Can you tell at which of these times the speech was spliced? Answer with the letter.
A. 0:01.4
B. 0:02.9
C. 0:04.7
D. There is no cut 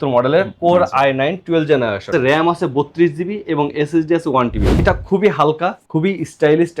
C